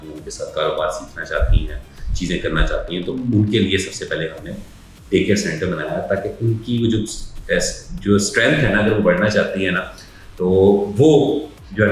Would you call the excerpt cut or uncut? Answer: uncut